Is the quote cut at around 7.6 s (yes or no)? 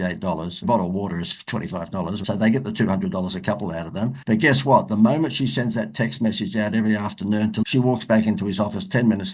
yes